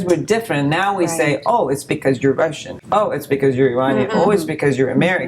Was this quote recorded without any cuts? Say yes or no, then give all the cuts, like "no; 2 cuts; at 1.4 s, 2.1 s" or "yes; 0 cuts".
yes; 0 cuts